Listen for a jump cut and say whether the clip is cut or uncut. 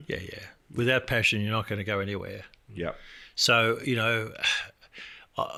uncut